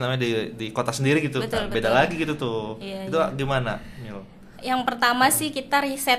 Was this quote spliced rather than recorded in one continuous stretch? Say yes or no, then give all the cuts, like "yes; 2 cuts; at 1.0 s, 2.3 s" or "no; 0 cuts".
no; 0 cuts